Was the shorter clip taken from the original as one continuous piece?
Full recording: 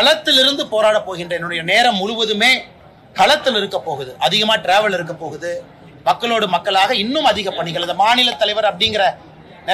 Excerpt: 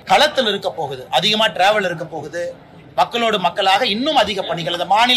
yes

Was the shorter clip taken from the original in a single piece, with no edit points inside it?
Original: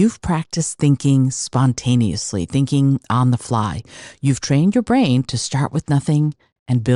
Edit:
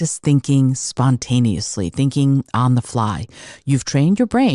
yes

